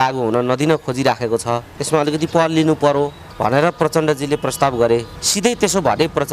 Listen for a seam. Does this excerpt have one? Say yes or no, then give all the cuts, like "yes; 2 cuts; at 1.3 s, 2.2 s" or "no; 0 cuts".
yes; 3 cuts; at 1.7 s, 3.2 s, 5.2 s